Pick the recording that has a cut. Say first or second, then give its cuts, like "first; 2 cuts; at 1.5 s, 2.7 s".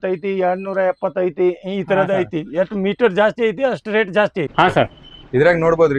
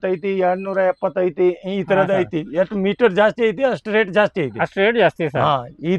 first; 1 cut; at 4.5 s